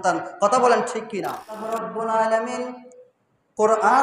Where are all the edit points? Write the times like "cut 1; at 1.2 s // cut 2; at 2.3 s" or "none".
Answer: cut 1; at 1.6 s